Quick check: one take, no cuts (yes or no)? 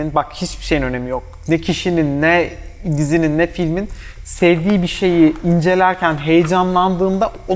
yes